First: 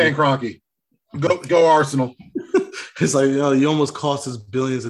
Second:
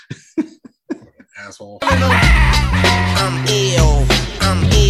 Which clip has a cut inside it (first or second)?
second